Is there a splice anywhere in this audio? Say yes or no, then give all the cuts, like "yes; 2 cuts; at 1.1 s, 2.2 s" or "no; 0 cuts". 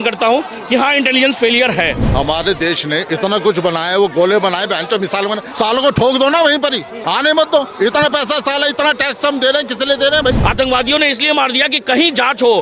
yes; 4 cuts; at 2.0 s, 5.4 s, 6.9 s, 10.4 s